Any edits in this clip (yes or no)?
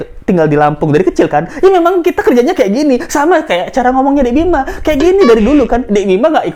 no